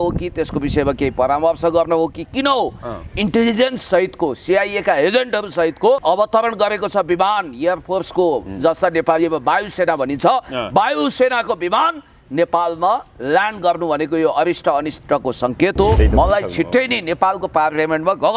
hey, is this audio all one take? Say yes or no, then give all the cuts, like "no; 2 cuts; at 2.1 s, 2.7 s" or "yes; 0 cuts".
no; 2 cuts; at 6.0 s, 16.0 s